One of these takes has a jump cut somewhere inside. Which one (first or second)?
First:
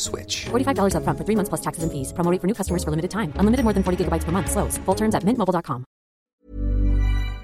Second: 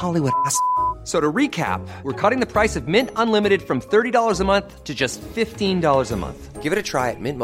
first